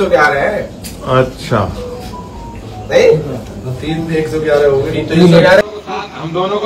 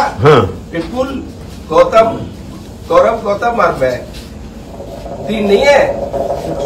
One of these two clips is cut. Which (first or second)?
first